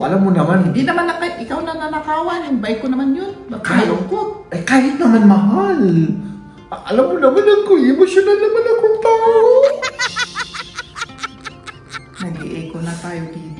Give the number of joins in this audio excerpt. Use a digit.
0